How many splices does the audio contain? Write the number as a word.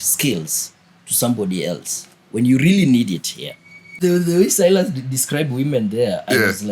one